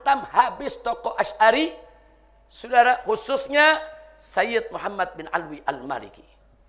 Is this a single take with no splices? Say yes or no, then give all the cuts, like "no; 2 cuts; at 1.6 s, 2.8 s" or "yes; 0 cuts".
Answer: yes; 0 cuts